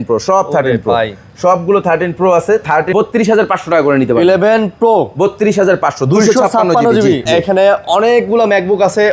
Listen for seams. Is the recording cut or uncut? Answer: cut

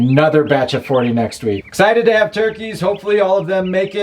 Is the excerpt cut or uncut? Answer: cut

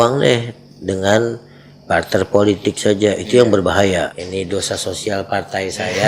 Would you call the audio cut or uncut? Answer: cut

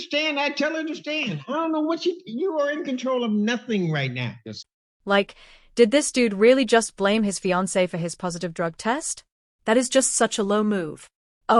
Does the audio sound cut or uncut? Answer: uncut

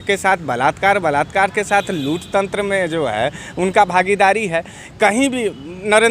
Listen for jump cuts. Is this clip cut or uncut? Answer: uncut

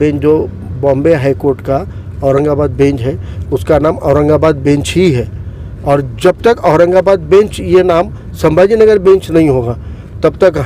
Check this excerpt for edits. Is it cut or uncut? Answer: uncut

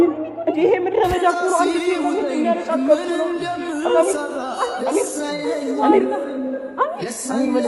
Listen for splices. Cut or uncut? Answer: uncut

